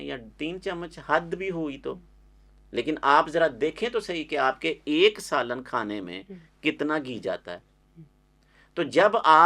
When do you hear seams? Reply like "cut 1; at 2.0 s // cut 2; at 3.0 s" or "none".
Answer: none